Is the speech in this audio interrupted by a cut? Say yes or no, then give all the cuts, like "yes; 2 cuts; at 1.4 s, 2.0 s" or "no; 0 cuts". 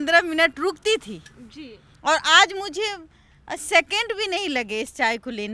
no; 0 cuts